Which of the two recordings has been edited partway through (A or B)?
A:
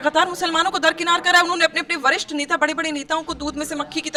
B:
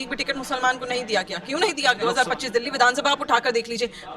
B